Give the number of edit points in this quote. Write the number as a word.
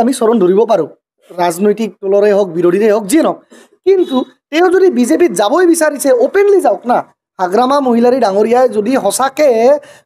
zero